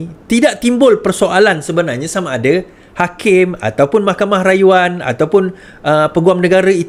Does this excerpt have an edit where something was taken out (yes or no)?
no